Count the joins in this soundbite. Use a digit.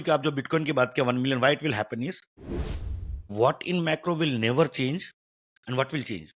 1